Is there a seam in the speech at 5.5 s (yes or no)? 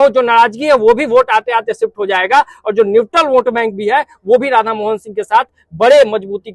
no